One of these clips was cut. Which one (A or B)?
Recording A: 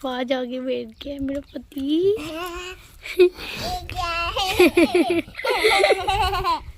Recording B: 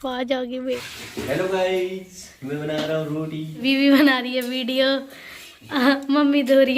B